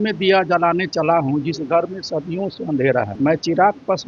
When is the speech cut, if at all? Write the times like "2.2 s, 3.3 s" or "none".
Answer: 3.1 s